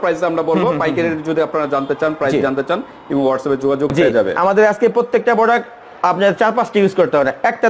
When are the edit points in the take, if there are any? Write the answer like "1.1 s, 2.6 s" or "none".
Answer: 3.9 s